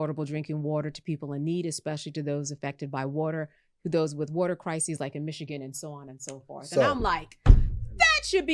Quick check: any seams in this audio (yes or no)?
no